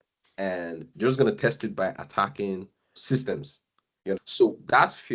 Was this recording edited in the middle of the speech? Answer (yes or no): yes